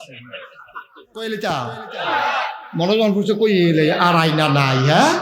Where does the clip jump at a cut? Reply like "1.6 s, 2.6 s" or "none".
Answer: 1.2 s